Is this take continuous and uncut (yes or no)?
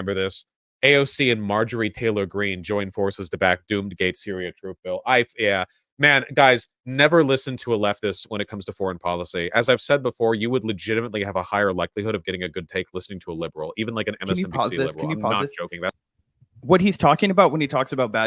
yes